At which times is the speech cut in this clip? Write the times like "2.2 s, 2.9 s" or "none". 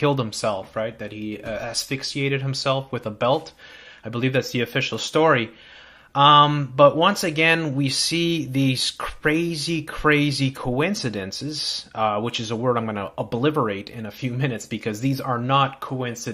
7.9 s